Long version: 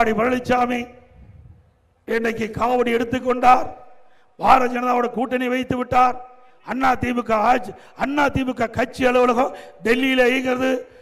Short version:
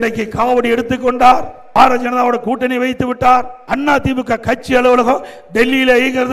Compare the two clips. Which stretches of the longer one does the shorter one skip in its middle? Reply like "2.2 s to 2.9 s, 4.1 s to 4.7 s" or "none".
3.8 s to 4.3 s, 6.3 s to 7.9 s